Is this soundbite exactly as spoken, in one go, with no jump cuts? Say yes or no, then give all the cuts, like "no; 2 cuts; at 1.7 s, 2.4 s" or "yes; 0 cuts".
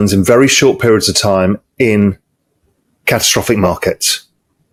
yes; 0 cuts